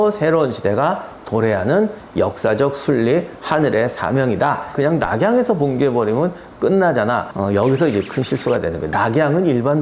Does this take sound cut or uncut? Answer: cut